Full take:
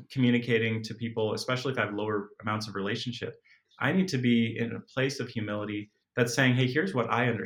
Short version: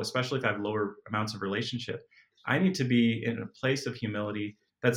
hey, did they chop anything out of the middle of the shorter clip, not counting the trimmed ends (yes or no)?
no